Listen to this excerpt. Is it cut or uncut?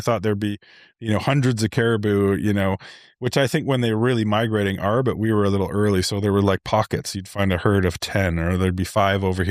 uncut